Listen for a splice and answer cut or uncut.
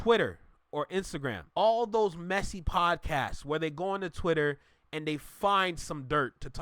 cut